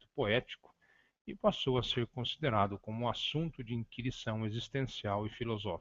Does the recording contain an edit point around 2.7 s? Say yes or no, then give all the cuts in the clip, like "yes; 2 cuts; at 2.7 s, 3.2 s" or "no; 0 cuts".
yes; 1 cut; at 2.7 s